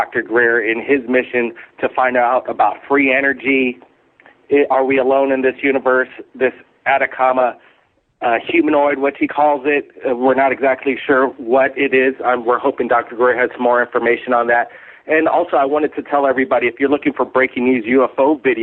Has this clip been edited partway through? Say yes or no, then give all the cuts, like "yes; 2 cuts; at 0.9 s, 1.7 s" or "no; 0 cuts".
yes; 1 cut; at 5.8 s